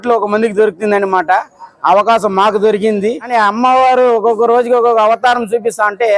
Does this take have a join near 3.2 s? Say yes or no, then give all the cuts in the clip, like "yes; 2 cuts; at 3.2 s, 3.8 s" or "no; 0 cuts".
yes; 1 cut; at 3.2 s